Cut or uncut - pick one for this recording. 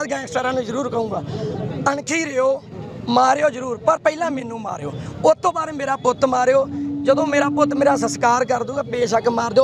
uncut